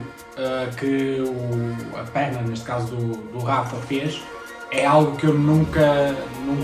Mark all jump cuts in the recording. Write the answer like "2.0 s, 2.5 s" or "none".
none